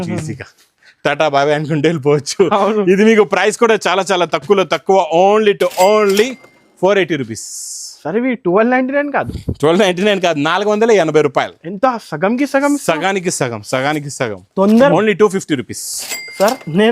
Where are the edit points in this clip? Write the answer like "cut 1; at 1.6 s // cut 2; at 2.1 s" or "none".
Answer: cut 1; at 14.9 s